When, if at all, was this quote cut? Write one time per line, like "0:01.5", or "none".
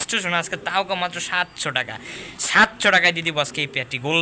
none